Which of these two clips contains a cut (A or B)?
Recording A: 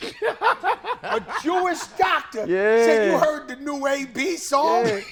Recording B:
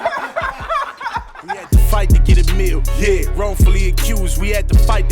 B